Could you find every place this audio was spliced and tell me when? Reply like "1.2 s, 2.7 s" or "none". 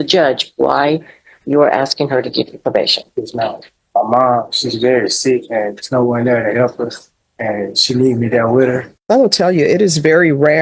3.7 s, 8.9 s